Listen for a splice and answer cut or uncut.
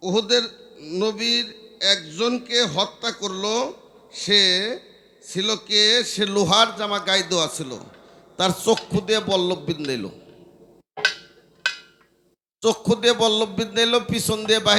uncut